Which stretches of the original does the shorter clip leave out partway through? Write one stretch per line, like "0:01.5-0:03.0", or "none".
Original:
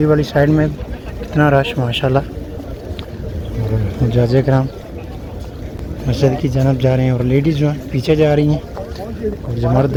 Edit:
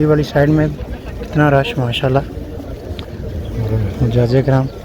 none